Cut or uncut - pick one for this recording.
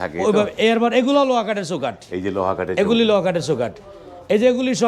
uncut